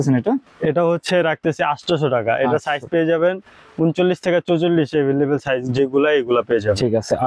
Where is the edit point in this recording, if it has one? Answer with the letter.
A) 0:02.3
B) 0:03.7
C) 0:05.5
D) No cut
D